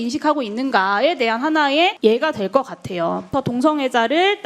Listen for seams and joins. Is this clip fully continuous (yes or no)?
no